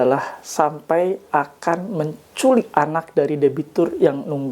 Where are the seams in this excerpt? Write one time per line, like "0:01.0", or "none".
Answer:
0:02.7